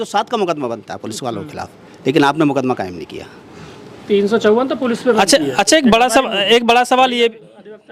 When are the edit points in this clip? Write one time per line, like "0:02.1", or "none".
none